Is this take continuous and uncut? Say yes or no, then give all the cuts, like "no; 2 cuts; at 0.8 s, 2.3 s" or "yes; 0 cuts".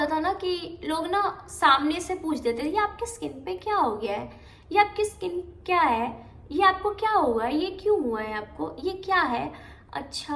yes; 0 cuts